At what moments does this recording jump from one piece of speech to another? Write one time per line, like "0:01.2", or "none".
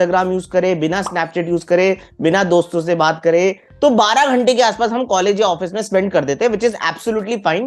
0:03.7